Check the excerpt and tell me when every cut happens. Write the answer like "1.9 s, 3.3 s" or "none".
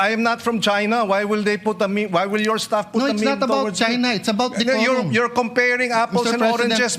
4.2 s